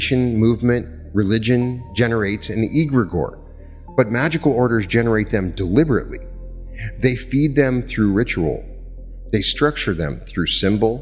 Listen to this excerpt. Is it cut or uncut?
uncut